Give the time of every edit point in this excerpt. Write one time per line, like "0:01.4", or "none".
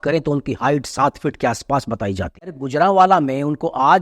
0:02.6